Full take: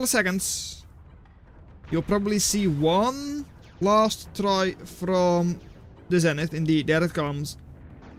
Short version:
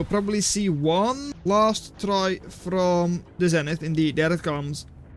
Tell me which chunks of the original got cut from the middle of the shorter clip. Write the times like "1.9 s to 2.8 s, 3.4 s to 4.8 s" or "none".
3.3 s to 3.6 s, 5.6 s to 6.0 s